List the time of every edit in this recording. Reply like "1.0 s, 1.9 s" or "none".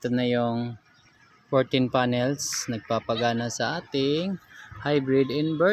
none